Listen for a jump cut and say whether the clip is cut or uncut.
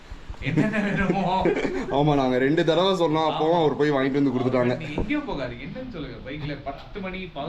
uncut